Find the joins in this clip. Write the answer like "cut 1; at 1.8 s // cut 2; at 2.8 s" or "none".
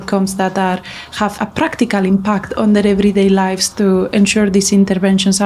cut 1; at 1.3 s

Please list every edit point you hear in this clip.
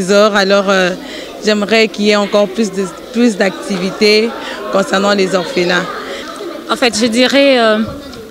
cut 1; at 6.1 s

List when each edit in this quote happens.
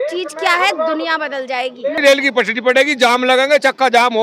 cut 1; at 2.0 s

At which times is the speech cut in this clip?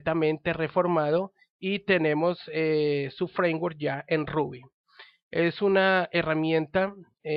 cut 1; at 2.1 s

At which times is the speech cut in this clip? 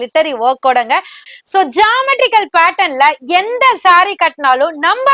cut 1; at 1.2 s

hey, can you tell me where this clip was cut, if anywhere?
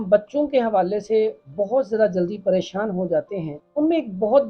cut 1; at 3.6 s

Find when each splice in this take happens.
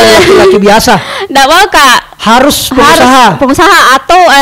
none

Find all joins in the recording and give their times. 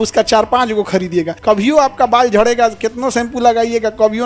cut 1; at 1.3 s

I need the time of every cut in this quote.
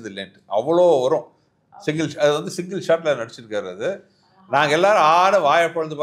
none

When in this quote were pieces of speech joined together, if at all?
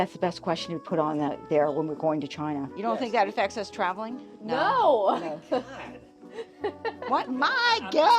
cut 1; at 2.8 s

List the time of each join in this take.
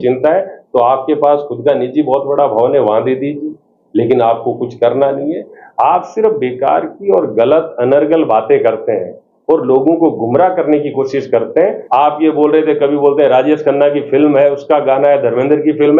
cut 1; at 11.8 s

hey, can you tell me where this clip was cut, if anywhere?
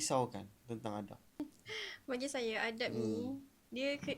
cut 1; at 1.4 s

